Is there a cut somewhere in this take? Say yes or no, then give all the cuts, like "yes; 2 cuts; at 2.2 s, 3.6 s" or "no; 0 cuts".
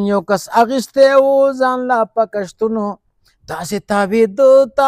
no; 0 cuts